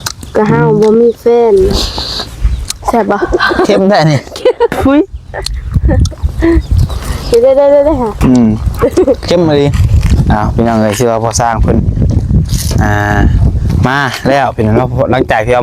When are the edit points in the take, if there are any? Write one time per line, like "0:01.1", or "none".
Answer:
0:09.9

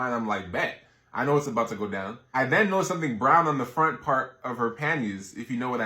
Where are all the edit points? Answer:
0:04.9

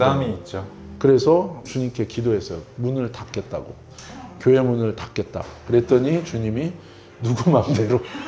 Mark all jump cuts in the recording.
none

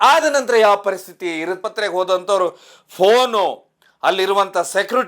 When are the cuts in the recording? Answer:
0:01.6

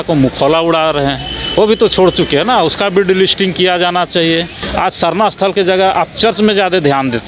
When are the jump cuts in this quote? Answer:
0:04.6

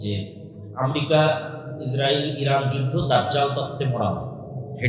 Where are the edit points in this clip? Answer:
none

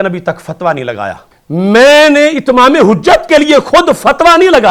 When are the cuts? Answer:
0:01.3

